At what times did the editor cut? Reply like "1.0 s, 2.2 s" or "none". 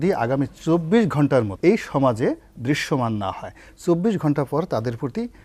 1.5 s